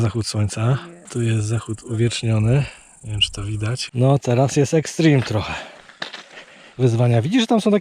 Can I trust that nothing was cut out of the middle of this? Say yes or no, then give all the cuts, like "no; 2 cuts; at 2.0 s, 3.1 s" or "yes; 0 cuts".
no; 2 cuts; at 1.0 s, 3.8 s